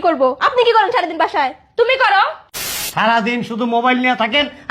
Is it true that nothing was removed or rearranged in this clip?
no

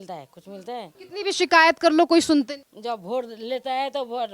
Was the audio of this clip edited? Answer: yes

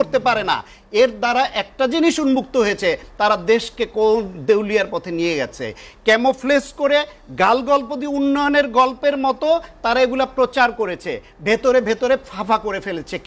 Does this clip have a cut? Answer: no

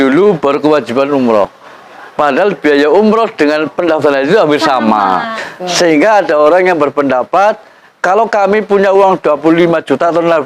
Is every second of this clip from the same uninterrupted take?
no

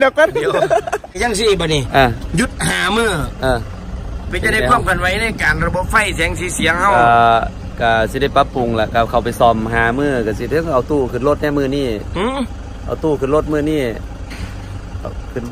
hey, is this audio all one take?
no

